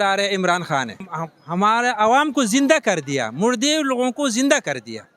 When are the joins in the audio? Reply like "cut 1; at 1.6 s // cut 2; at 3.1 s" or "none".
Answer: cut 1; at 1.0 s